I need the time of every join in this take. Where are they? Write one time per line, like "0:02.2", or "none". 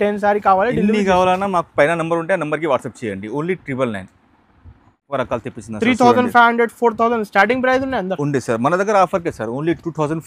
0:05.1